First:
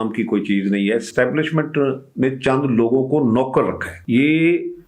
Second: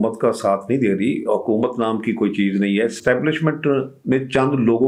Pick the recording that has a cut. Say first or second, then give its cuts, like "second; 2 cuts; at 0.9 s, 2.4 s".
first; 1 cut; at 3.9 s